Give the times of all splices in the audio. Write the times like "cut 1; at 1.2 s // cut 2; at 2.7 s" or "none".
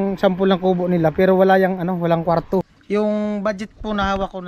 cut 1; at 2.8 s